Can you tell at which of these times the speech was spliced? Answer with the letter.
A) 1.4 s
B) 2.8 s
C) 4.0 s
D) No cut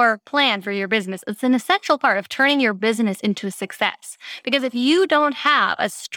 D